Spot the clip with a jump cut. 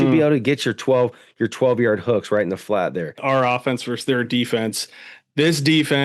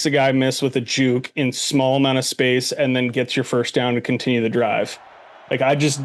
first; 1 cut; at 3.2 s

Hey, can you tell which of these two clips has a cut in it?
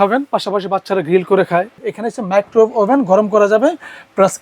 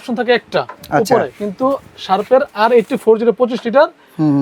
first; 1 cut; at 1.8 s

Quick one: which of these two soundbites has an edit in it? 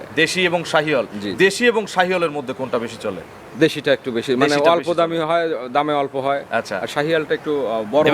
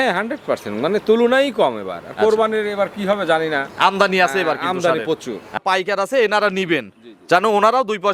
second; 1 cut; at 5.6 s

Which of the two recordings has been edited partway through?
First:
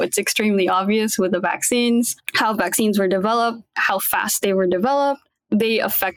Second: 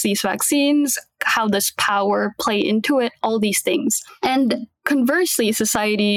second; 1 cut; at 4.7 s

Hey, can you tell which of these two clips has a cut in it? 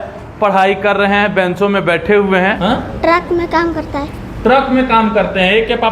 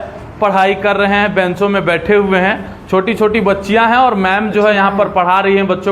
first; 1 cut; at 2.6 s

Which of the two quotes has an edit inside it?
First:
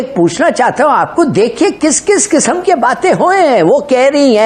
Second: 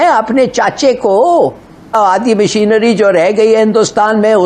second; 1 cut; at 1.9 s

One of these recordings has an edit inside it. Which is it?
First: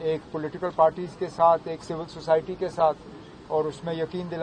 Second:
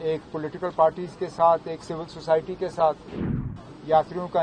second; 1 cut; at 3.5 s

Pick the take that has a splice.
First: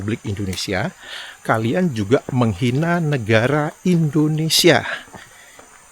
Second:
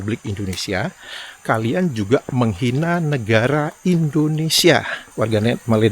second; 1 cut; at 5.0 s

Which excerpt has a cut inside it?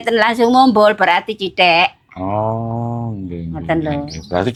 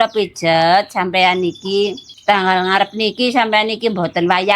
second; 1 cut; at 2.1 s

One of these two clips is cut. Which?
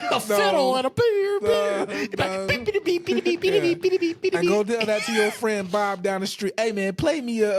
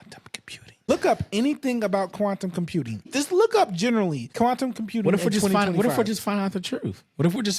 second; 3 cuts; at 0.9 s, 3.1 s, 4.2 s

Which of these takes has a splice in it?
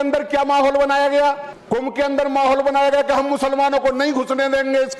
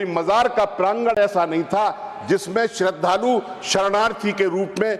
first; 1 cut; at 1.5 s

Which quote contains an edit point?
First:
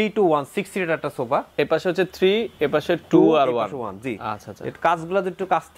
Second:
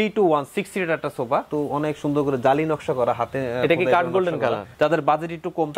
second; 2 cuts; at 1.5 s, 4.7 s

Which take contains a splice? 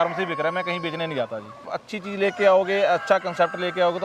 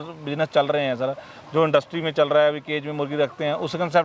first; 1 cut; at 1.7 s

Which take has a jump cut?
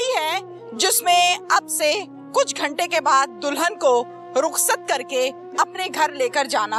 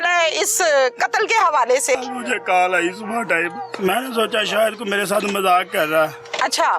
second; 2 cuts; at 2.0 s, 3.7 s

